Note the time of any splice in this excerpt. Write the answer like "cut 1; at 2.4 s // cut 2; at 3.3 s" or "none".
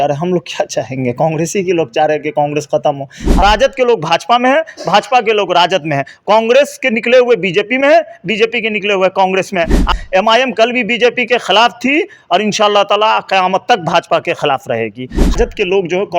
cut 1; at 3.4 s // cut 2; at 9.9 s // cut 3; at 15.3 s

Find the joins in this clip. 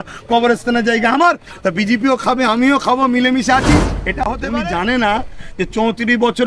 cut 1; at 4.2 s

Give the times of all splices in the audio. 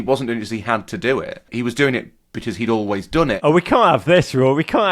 cut 1; at 1.5 s // cut 2; at 3.4 s

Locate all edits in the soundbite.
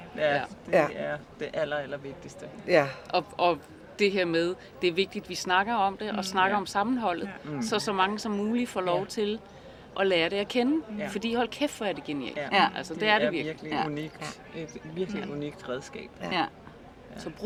none

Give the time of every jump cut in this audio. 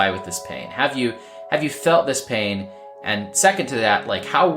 none

